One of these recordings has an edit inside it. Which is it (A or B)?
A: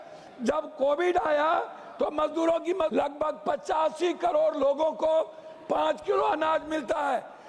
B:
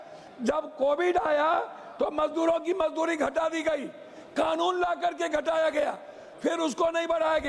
A